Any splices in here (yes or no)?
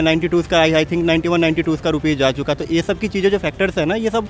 no